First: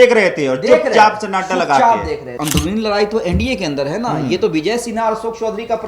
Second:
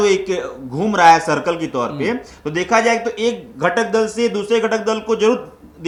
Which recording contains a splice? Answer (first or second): first